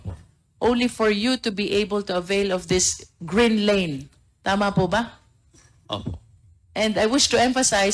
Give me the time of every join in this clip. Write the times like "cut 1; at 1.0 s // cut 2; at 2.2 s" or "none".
none